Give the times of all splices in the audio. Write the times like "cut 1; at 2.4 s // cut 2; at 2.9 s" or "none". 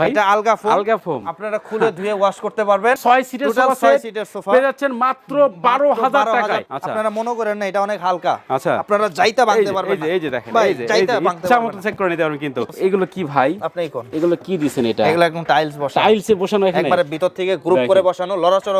cut 1; at 3.0 s // cut 2; at 6.7 s // cut 3; at 12.6 s